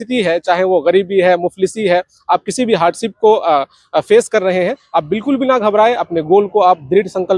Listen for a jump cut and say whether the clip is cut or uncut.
uncut